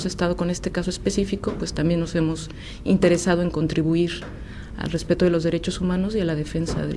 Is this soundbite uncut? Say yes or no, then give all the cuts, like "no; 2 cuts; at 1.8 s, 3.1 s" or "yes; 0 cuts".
yes; 0 cuts